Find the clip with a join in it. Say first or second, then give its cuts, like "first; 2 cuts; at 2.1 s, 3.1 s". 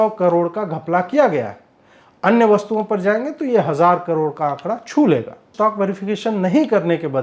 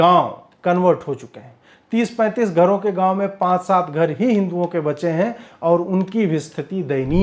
first; 1 cut; at 5.5 s